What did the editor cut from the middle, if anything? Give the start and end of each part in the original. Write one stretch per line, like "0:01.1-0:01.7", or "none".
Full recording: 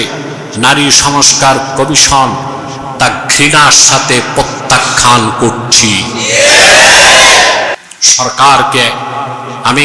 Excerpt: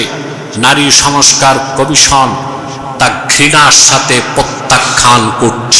none

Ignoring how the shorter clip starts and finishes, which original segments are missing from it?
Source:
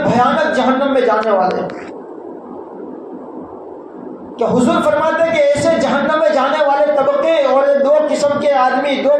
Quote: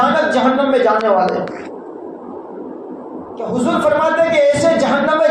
0:03.7-0:04.5

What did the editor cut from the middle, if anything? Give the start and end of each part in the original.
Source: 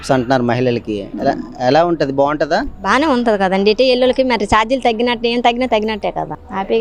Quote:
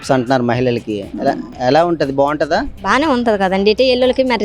none

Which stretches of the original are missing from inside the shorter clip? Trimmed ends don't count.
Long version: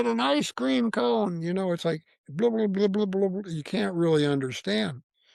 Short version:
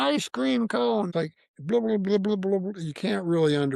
0:01.3-0:01.8

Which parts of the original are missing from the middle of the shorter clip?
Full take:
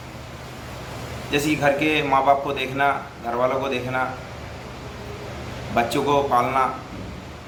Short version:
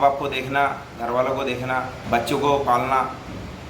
0:04.2-0:05.6

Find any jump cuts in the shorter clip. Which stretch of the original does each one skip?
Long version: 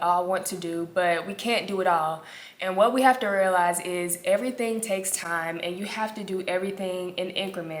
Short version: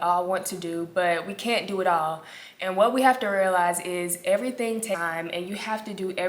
0:05.0-0:05.3

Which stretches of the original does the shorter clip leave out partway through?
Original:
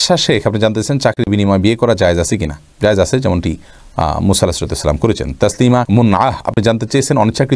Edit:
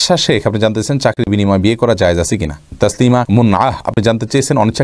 0:02.7-0:05.3

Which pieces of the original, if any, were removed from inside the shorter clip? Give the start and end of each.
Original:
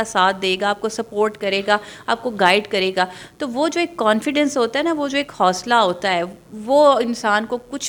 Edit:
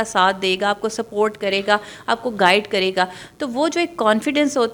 none

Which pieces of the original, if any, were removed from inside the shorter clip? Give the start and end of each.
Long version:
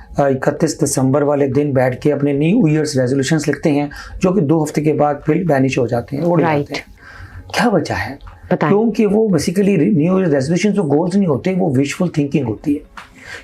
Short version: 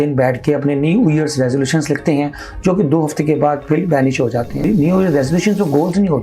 0:06.2-0:09.8

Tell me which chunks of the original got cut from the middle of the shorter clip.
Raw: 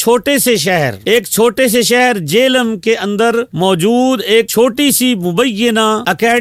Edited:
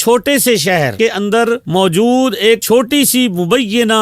0:00.9-0:02.8

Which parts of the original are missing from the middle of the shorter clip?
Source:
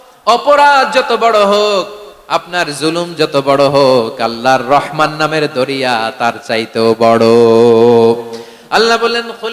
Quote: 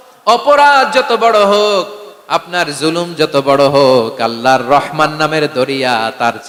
none

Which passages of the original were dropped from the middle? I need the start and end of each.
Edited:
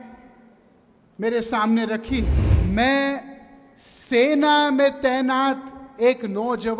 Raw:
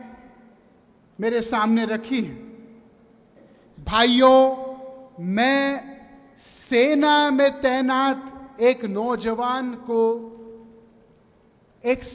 0:02.5-0:05.1

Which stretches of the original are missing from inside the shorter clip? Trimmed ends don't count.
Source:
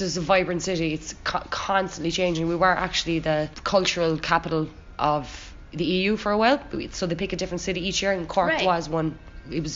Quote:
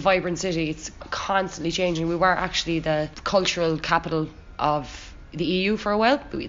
0:01.2-0:01.3

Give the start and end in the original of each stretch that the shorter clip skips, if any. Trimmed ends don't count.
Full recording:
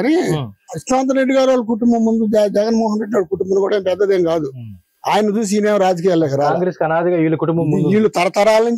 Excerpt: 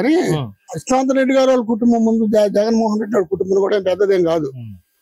none

